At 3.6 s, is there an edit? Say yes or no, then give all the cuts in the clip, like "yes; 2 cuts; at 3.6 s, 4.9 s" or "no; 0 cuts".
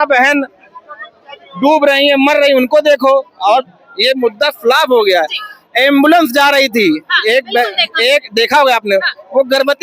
yes; 1 cut; at 3.6 s